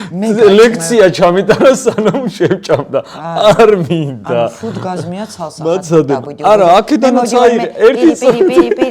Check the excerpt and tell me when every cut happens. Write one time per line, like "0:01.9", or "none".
none